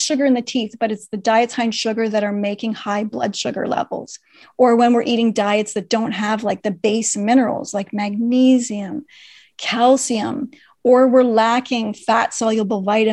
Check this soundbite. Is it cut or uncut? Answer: uncut